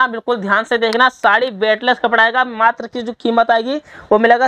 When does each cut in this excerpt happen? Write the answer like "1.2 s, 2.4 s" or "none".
none